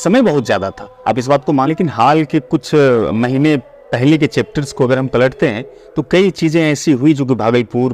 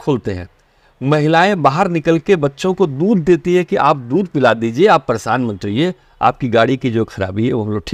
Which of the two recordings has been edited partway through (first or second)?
first